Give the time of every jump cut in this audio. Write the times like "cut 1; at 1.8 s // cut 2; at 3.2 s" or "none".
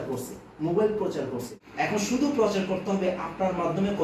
cut 1; at 1.6 s